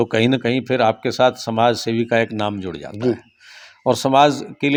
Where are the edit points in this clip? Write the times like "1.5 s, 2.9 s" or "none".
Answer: none